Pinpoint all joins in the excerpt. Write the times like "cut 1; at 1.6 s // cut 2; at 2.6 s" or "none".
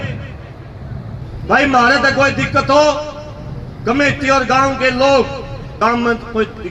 cut 1; at 1.1 s // cut 2; at 5.6 s

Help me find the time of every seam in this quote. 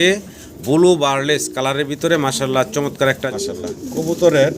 cut 1; at 3.2 s

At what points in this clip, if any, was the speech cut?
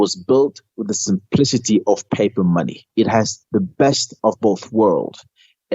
cut 1; at 2.9 s

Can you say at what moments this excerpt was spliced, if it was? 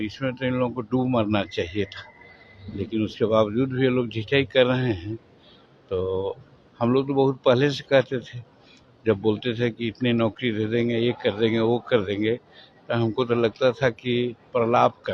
none

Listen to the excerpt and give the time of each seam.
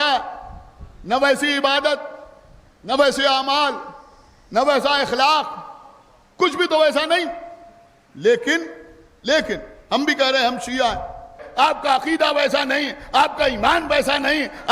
cut 1; at 11.4 s

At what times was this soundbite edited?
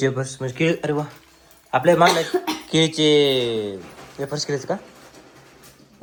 none

